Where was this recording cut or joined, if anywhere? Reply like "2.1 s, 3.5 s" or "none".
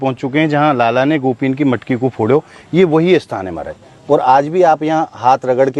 none